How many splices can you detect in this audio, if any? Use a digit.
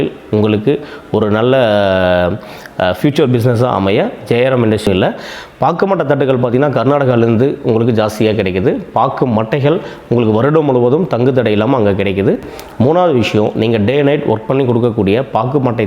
2